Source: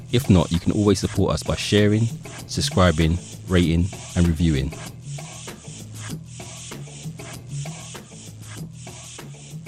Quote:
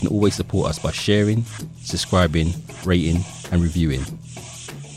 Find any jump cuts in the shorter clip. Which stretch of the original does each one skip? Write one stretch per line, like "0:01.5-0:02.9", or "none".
0:04.7-0:08.6